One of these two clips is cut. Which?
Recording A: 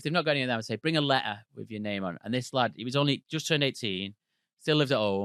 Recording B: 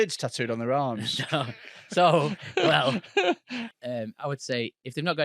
B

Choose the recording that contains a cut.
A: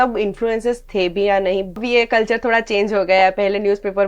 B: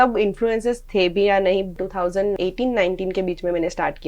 A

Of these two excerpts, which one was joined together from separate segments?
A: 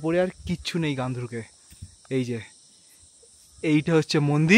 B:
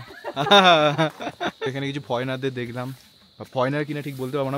B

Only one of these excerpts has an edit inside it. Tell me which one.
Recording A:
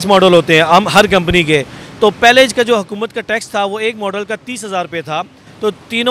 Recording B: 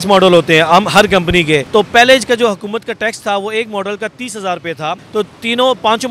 B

